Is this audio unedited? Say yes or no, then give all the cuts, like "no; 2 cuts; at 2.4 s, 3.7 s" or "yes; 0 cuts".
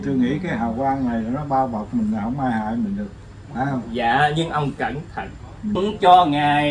no; 1 cut; at 5.8 s